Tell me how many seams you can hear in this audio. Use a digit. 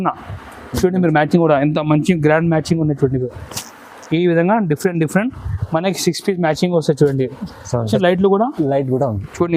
1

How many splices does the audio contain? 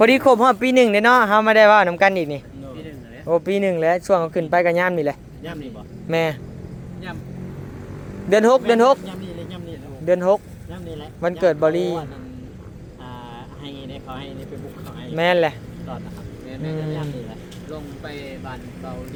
0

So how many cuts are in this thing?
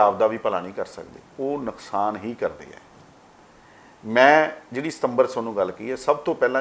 0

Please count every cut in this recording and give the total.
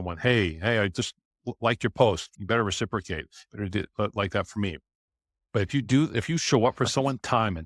1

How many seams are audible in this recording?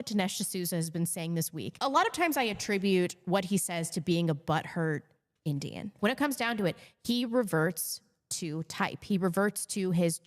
2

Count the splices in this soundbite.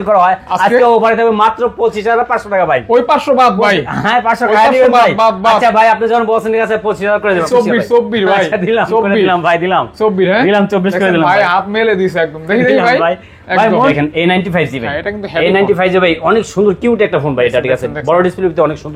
2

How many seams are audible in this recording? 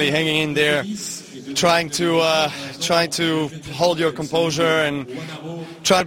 0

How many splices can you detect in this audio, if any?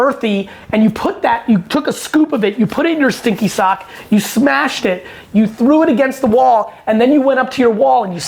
0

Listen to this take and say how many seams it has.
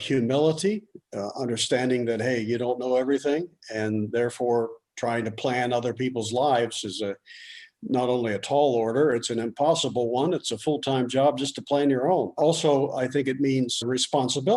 2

